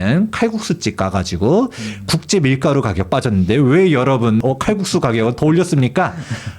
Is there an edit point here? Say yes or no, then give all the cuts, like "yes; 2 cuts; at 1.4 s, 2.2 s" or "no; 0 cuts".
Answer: yes; 1 cut; at 4.4 s